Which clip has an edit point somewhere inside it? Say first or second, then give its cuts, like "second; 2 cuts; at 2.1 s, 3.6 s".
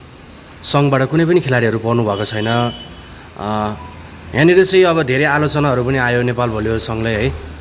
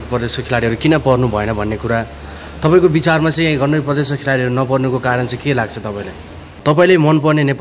second; 1 cut; at 6.6 s